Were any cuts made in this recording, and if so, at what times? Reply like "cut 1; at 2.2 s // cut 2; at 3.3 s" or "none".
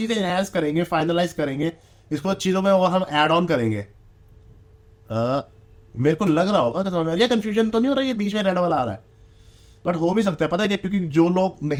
none